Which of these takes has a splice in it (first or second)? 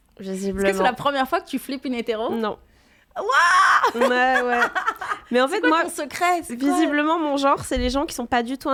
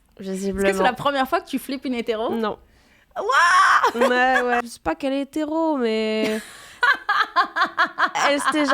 second